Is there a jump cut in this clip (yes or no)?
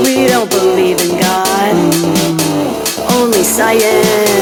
no